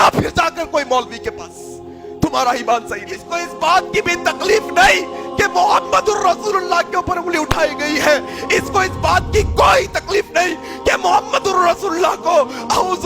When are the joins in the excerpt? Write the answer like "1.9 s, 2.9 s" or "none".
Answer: 3.3 s